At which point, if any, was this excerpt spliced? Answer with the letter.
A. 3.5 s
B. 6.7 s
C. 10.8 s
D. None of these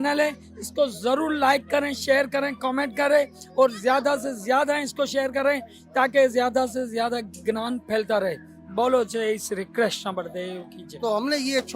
C